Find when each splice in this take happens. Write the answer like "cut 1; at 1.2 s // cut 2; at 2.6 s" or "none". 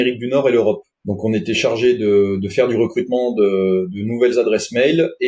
cut 1; at 1.0 s